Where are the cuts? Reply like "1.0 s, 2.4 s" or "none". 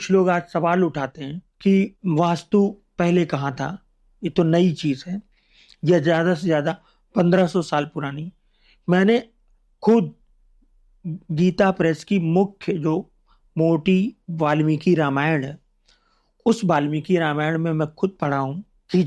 none